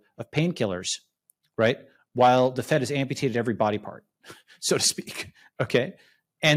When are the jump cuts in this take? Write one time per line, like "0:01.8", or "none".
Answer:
none